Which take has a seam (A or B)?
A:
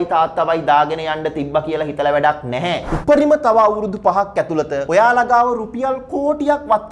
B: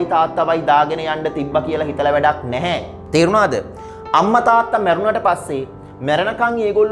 A